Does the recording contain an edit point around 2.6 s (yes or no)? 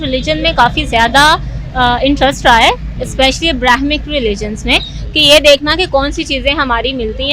no